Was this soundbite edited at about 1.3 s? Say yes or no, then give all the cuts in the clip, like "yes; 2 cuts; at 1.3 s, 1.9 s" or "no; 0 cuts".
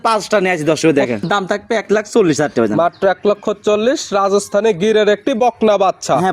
yes; 1 cut; at 1.3 s